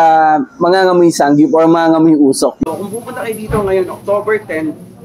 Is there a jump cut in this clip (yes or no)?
yes